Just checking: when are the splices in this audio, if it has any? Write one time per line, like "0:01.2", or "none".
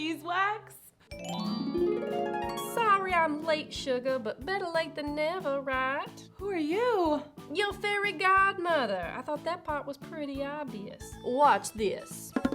0:11.0